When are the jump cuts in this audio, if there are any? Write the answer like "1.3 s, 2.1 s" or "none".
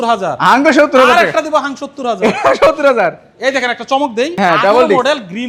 none